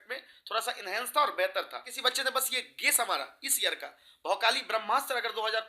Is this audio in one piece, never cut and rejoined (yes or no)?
no